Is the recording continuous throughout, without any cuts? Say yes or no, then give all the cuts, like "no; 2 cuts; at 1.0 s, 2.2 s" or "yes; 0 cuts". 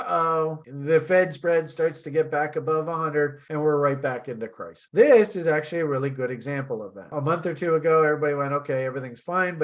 no; 2 cuts; at 4.7 s, 7.1 s